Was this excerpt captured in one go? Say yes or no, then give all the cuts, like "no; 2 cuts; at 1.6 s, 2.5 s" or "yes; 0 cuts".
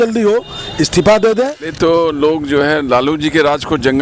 no; 1 cut; at 1.2 s